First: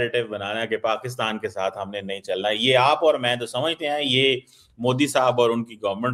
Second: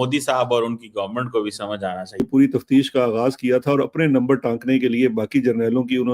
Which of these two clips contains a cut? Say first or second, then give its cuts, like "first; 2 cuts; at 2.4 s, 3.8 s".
second; 1 cut; at 2.3 s